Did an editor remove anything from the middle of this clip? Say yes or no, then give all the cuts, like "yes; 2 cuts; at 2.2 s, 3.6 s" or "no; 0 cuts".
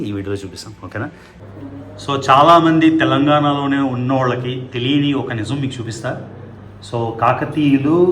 yes; 1 cut; at 1.3 s